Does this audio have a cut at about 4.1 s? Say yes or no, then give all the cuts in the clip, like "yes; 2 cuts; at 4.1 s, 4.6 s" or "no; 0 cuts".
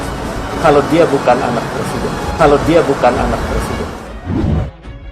yes; 1 cut; at 4.1 s